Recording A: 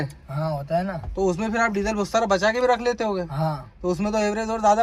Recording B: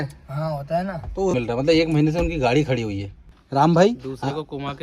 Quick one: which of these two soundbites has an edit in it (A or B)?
B